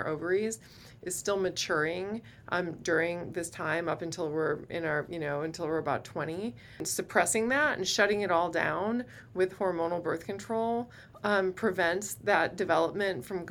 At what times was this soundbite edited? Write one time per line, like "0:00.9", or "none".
0:06.9